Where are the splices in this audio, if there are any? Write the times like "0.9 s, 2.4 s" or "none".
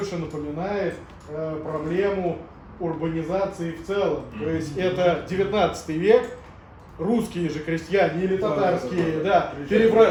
none